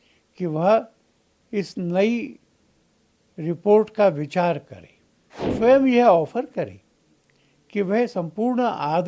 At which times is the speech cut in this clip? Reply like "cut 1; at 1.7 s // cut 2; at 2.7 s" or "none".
cut 1; at 5.5 s